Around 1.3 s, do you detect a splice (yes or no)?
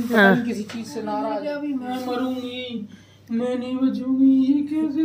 yes